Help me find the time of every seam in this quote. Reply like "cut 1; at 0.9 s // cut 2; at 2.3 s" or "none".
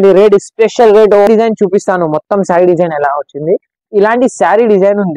cut 1; at 1.3 s